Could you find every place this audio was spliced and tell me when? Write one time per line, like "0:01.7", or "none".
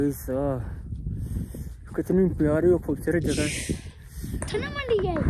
none